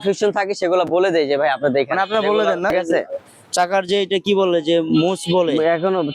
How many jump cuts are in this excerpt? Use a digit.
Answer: 1